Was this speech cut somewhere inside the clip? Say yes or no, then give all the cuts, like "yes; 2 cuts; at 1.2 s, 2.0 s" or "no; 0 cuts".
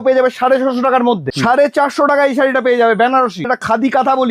yes; 2 cuts; at 1.3 s, 3.5 s